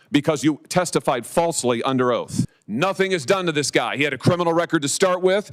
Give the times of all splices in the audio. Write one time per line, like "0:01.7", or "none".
0:02.6